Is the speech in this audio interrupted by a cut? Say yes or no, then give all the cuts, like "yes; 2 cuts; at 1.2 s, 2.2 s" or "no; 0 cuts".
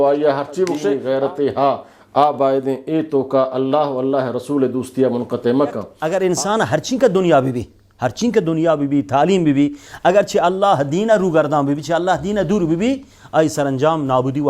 yes; 2 cuts; at 0.9 s, 5.9 s